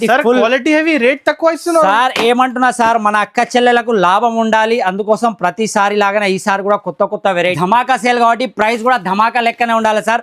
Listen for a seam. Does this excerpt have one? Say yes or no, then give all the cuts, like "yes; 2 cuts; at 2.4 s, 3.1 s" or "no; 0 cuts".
yes; 1 cut; at 7.6 s